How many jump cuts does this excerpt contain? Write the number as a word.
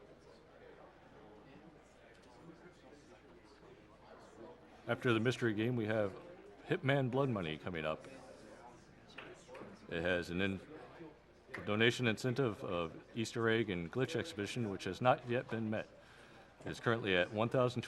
one